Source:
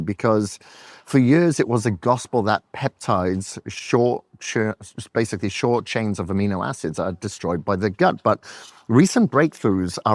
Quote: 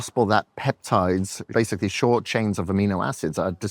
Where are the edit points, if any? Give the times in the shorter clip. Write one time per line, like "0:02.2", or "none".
0:01.4